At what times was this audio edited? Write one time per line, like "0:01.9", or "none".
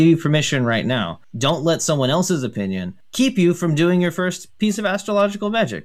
0:01.2
0:03.0